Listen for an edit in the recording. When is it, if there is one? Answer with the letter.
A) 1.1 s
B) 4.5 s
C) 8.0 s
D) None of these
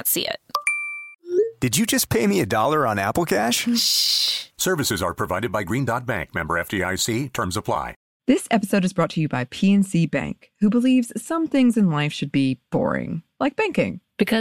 C